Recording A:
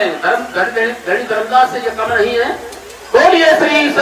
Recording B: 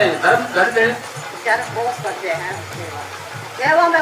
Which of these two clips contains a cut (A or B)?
B